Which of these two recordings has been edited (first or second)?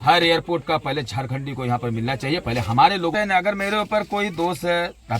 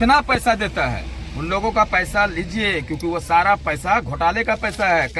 first